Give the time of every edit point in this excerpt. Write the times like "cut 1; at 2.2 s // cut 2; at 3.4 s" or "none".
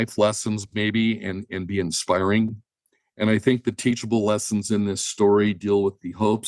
none

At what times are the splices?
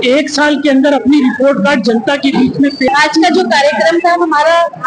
cut 1; at 2.9 s

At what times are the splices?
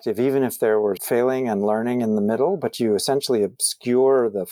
cut 1; at 1.0 s

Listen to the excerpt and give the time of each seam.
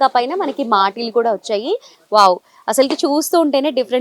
cut 1; at 1.9 s

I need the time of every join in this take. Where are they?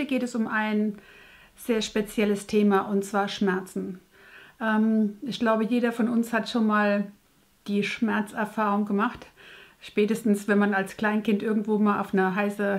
cut 1; at 2.3 s

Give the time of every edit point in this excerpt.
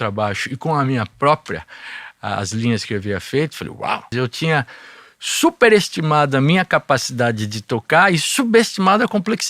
cut 1; at 4.1 s

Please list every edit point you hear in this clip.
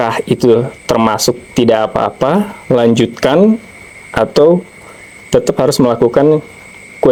none

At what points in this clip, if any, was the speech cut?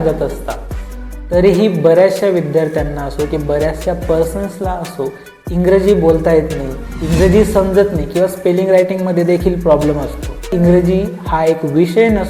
cut 1; at 10.5 s

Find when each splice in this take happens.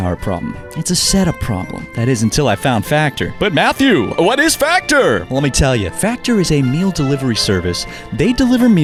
none

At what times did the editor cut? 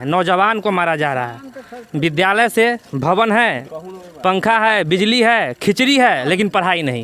none

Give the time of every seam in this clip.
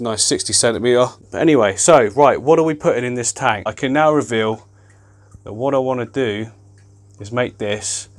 cut 1; at 1.2 s // cut 2; at 3.7 s

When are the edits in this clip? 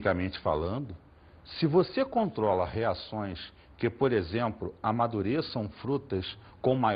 cut 1; at 3.2 s

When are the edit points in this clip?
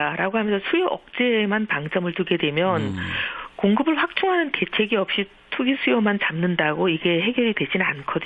none

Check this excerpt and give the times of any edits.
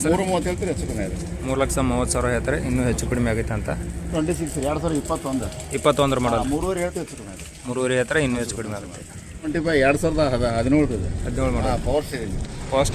cut 1; at 4.1 s // cut 2; at 9.5 s

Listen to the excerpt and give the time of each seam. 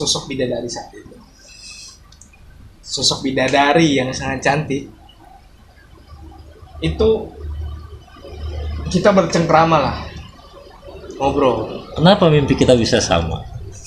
none

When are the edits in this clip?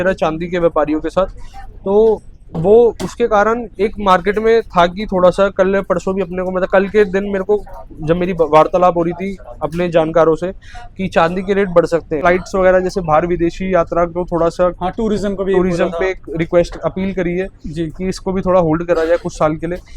cut 1; at 12.2 s

